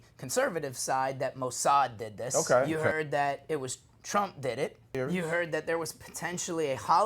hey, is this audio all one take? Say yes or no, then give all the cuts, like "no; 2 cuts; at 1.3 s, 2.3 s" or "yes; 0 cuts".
no; 2 cuts; at 2.2 s, 4.9 s